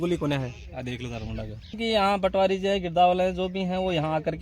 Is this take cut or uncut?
cut